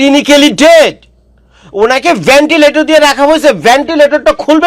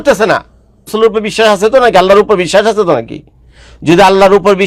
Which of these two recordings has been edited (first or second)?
second